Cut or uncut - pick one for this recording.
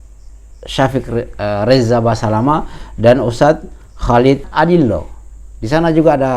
cut